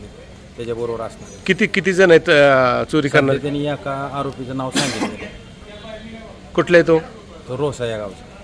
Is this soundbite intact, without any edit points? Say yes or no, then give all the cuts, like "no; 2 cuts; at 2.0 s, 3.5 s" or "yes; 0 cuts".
yes; 0 cuts